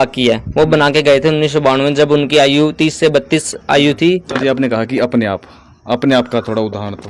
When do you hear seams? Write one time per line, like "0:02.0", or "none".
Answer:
0:04.3